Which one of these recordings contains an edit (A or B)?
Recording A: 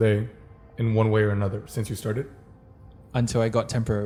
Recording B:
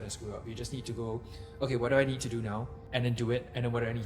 B